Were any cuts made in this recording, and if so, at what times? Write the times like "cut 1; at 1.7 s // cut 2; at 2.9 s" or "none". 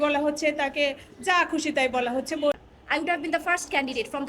cut 1; at 2.5 s